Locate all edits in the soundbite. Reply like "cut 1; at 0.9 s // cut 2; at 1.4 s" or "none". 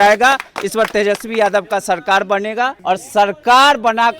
cut 1; at 2.8 s